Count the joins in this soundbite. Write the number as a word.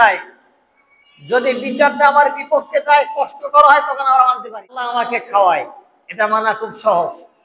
one